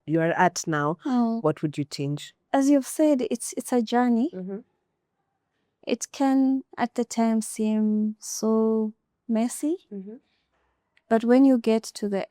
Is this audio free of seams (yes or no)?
no